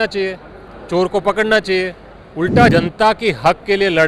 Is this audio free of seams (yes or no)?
no